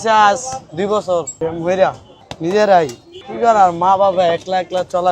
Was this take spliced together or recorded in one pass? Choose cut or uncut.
cut